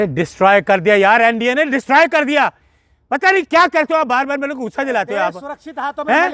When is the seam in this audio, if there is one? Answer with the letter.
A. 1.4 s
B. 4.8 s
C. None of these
C